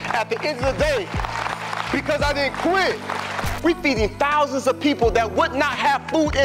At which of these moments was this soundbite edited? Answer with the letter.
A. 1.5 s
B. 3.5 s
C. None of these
B